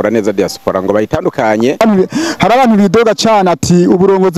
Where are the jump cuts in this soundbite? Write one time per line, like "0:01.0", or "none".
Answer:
0:01.8